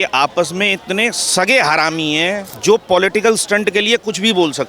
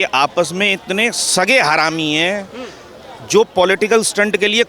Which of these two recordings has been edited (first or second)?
first